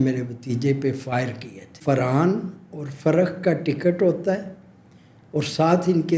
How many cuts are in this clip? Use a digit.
1